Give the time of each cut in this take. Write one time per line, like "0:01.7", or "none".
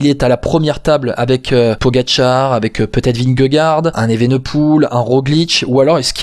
0:01.8
0:04.0